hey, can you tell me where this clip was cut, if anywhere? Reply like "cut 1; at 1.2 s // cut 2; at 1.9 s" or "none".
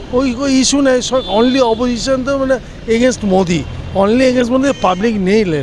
none